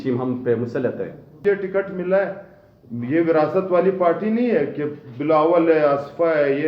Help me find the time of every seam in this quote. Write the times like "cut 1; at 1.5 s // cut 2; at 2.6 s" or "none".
cut 1; at 1.4 s